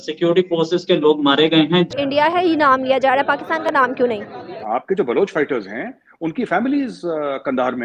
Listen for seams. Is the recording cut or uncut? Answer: cut